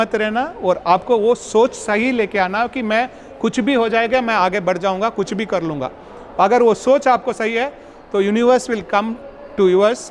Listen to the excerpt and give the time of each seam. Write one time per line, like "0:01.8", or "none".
none